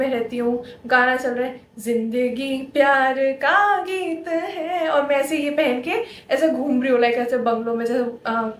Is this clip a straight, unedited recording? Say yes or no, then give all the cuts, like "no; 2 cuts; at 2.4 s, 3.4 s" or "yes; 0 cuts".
yes; 0 cuts